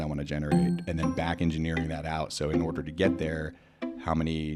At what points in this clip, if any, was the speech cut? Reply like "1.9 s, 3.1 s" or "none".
none